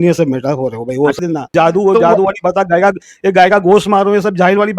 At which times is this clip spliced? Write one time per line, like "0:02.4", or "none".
0:01.2